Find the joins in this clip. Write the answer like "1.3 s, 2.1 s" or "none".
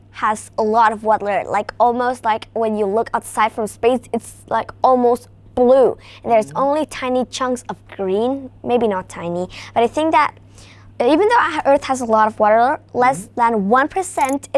none